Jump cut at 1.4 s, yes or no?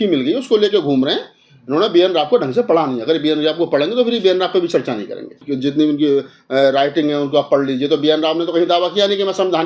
no